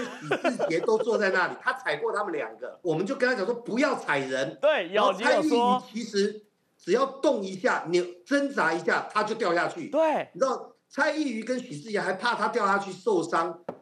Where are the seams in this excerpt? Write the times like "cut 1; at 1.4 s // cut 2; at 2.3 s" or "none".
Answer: cut 1; at 2.8 s